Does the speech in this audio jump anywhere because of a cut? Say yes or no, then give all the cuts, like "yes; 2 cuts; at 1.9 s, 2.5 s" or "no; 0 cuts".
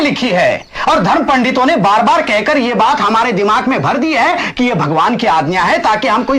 no; 0 cuts